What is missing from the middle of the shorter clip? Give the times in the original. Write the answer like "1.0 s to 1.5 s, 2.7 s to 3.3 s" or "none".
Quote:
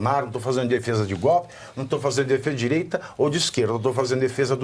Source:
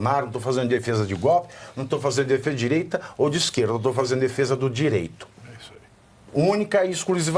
none